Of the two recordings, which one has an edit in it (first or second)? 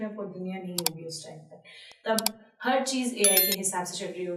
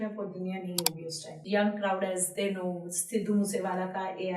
second